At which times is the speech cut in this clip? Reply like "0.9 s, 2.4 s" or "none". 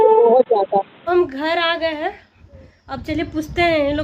1.0 s